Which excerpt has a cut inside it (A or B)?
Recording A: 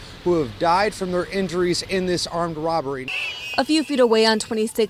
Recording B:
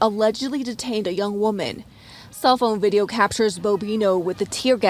A